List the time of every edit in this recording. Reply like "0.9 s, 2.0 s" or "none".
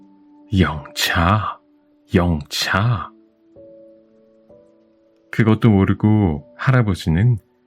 3.1 s, 5.2 s